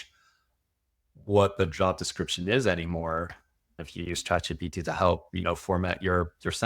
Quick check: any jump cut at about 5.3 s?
no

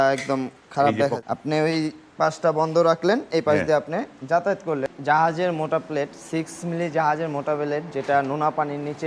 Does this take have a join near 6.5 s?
no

